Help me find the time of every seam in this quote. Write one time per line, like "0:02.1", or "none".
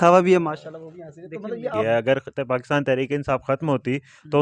0:01.8